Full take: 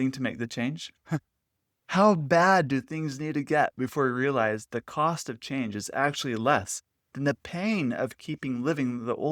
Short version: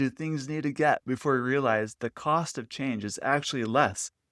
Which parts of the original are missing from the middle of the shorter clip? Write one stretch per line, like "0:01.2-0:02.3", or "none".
none